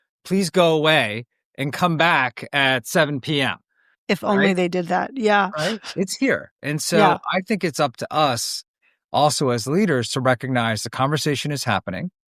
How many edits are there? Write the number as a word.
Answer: one